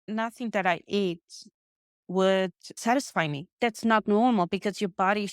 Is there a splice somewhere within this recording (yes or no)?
yes